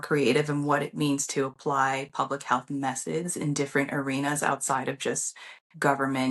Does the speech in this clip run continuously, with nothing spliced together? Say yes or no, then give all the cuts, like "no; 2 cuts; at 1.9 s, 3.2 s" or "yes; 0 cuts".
yes; 0 cuts